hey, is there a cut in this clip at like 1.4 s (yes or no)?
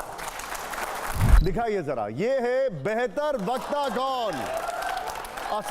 yes